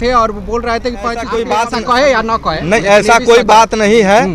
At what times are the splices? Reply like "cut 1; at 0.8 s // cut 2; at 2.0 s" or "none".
cut 1; at 1.3 s